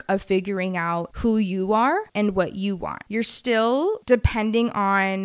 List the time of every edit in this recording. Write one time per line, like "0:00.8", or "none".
0:01.1
0:02.1
0:03.0
0:04.0